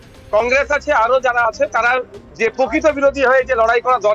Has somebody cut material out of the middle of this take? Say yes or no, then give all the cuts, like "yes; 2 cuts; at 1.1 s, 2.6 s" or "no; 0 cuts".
yes; 1 cut; at 2.2 s